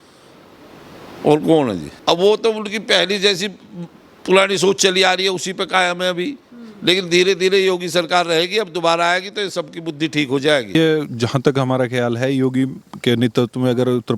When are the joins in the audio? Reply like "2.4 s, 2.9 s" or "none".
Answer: 1.9 s, 10.8 s